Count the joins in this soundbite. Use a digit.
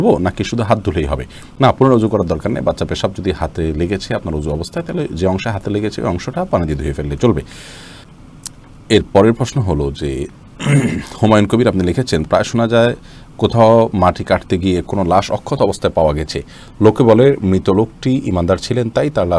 0